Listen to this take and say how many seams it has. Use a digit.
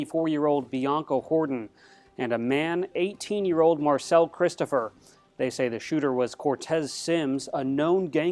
0